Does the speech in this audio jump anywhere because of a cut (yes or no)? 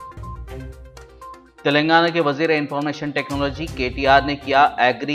no